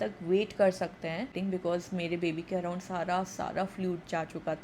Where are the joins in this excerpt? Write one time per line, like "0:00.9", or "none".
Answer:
0:01.3